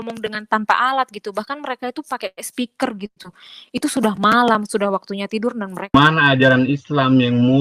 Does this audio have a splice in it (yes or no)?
yes